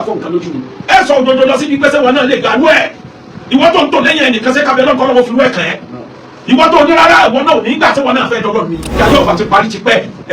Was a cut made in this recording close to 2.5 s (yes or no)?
no